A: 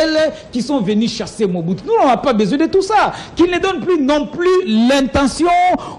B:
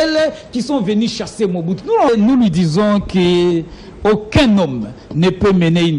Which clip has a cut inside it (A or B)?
B